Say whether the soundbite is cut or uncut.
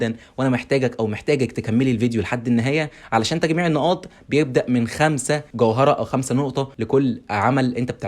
cut